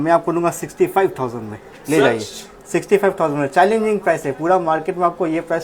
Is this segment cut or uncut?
uncut